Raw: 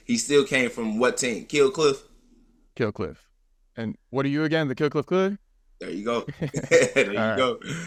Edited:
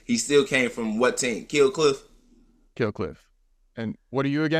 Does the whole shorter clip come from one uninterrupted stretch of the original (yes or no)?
yes